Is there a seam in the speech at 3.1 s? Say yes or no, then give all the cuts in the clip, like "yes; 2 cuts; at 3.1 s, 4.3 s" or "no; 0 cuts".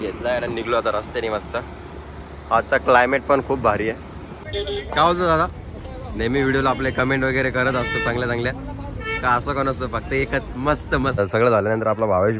no; 2 cuts; at 4.4 s, 11.2 s